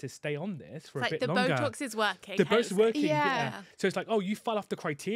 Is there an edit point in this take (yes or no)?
no